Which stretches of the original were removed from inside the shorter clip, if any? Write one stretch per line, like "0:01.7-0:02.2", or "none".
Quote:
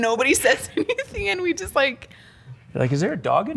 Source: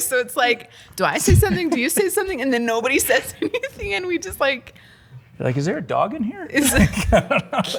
none